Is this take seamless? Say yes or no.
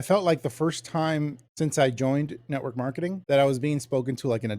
no